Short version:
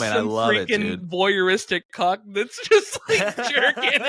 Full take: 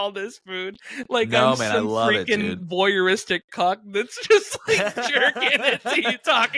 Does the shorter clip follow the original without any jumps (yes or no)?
yes